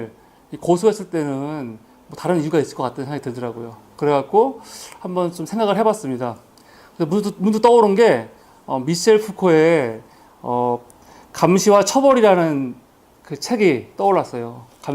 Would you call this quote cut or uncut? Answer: cut